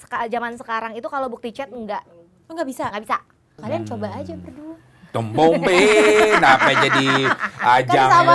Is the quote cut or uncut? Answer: cut